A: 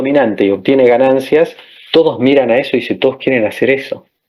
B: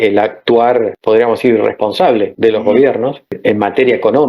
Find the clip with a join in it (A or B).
B